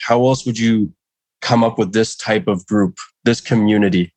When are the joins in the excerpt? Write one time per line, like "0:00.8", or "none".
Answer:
none